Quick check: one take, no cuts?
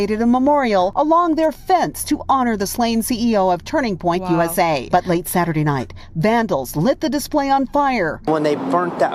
no; 2 cuts; at 0.9 s, 4.8 s

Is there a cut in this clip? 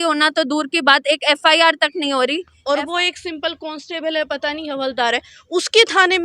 yes; 1 cut; at 2.5 s

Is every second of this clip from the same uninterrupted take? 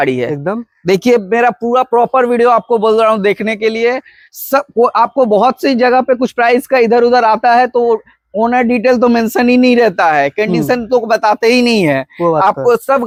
yes; 0 cuts

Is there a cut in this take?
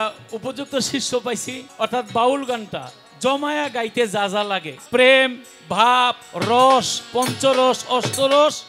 yes; 2 cuts; at 1.6 s, 4.7 s

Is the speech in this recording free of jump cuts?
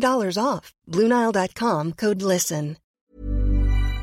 no; 1 cut; at 2.9 s

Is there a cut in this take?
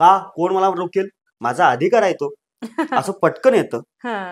no; 0 cuts

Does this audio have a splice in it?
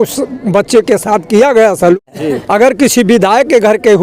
yes; 1 cut; at 2.0 s

